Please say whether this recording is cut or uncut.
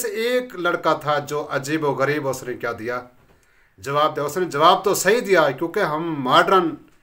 uncut